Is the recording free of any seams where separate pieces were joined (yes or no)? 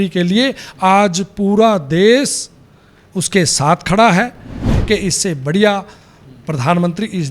no